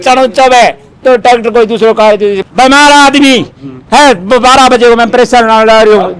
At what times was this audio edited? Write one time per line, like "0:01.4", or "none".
0:02.4